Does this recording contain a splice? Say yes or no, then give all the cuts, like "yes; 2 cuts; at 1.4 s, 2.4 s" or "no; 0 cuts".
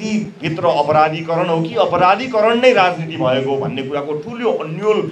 no; 0 cuts